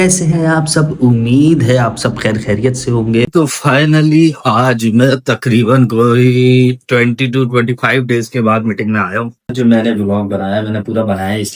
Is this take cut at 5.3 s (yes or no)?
no